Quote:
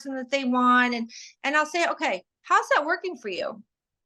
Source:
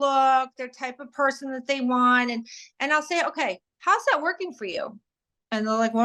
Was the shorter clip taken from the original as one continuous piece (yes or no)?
yes